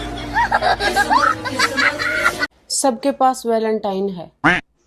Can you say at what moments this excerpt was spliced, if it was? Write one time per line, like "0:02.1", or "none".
none